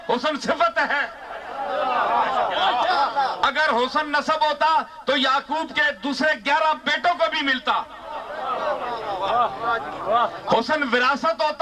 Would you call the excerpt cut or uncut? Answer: uncut